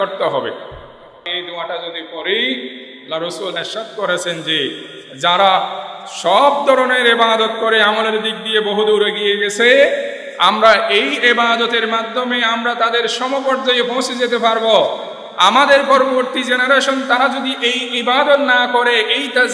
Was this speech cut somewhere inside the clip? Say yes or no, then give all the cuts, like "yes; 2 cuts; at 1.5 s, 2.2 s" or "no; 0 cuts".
yes; 1 cut; at 1.2 s